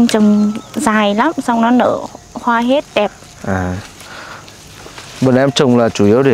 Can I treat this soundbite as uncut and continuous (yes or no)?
yes